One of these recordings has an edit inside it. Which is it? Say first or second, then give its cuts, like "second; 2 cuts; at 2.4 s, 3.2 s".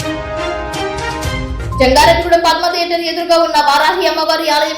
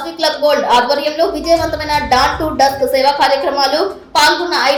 first; 1 cut; at 1.1 s